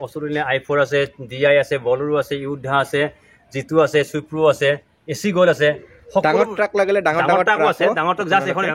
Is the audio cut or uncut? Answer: uncut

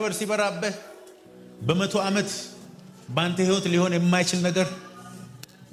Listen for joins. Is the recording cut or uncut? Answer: uncut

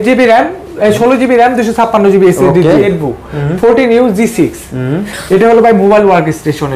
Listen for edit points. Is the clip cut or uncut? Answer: cut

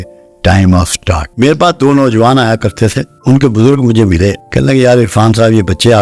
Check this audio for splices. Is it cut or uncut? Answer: cut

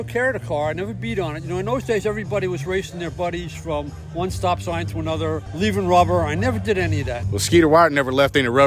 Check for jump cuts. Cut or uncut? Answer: cut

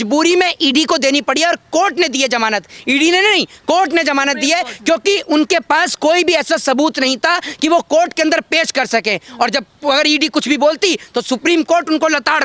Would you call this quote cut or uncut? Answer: uncut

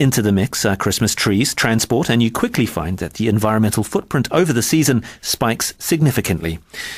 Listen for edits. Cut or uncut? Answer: cut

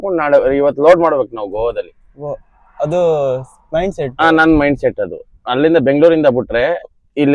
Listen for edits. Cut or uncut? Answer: uncut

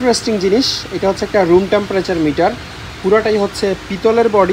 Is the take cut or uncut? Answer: uncut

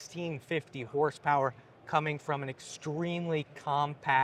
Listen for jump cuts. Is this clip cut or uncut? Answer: uncut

